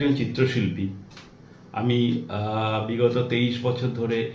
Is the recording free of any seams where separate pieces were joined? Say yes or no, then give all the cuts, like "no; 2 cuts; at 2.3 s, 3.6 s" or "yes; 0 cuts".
yes; 0 cuts